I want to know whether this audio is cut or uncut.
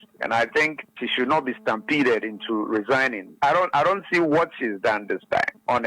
cut